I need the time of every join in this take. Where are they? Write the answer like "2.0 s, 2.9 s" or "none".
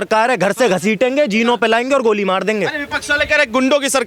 none

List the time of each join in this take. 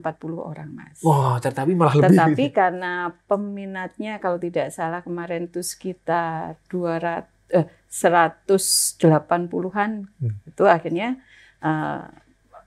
none

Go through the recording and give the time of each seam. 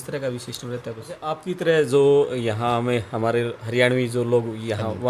1.4 s

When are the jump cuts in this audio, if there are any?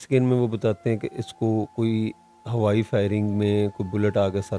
none

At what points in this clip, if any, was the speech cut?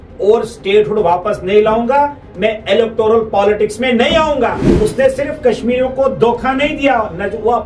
4.6 s

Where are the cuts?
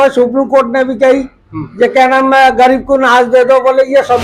none

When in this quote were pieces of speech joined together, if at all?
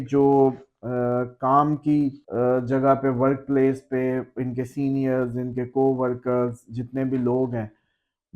2.2 s

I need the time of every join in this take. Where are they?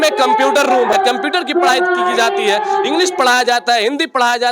0.9 s

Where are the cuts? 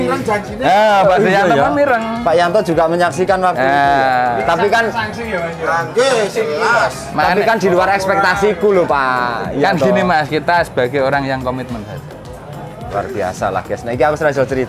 none

